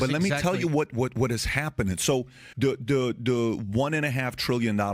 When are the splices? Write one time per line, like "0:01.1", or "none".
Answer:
0:02.4